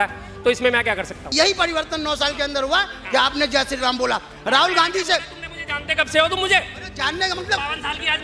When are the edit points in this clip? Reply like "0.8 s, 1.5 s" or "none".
1.3 s